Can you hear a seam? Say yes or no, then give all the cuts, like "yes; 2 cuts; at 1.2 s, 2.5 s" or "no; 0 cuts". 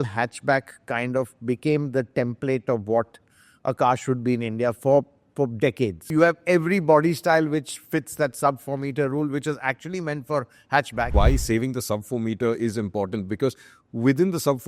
yes; 2 cuts; at 6.0 s, 11.1 s